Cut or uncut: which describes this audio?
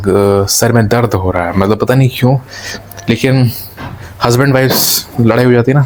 uncut